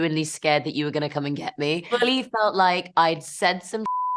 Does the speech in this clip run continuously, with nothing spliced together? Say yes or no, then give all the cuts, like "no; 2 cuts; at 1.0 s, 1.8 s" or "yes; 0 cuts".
no; 1 cut; at 1.8 s